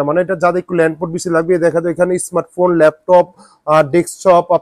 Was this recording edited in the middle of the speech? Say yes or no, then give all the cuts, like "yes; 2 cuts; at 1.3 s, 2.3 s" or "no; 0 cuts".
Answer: no; 0 cuts